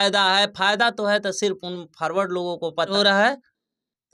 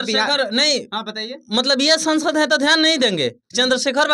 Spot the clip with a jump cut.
first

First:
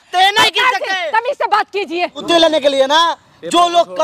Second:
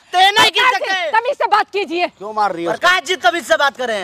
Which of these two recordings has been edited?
first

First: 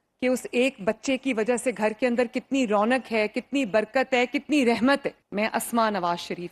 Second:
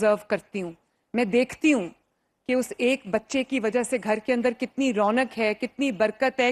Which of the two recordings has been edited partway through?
first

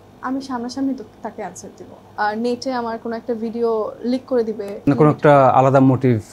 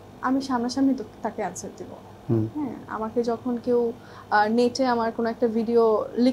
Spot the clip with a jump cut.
first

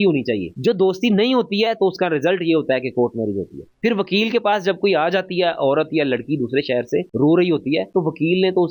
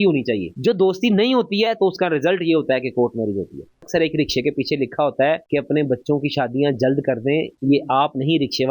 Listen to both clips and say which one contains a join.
second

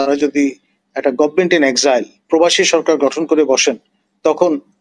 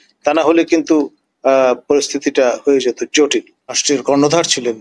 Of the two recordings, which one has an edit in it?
second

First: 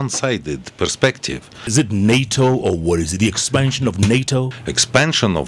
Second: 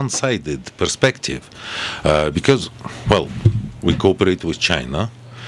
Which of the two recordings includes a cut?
first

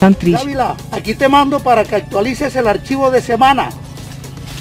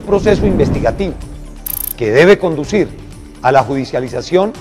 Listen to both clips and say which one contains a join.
second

